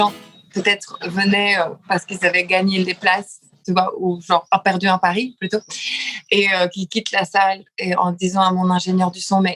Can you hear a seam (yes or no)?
no